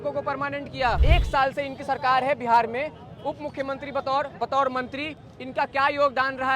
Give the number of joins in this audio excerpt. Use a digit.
1